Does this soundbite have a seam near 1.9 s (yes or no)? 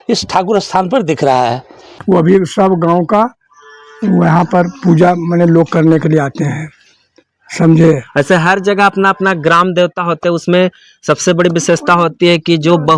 no